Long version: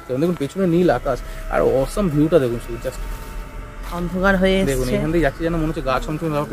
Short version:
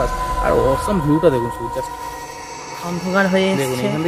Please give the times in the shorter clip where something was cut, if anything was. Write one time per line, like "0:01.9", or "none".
none